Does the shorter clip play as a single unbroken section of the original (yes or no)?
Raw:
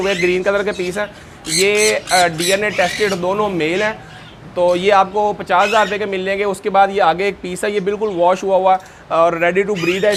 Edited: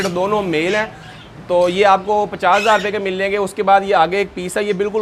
yes